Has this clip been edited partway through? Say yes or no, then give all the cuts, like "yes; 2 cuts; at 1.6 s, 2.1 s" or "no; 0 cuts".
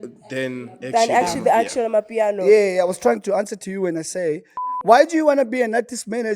yes; 1 cut; at 4.9 s